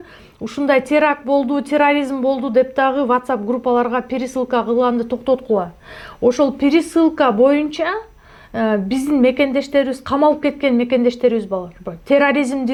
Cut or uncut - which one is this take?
uncut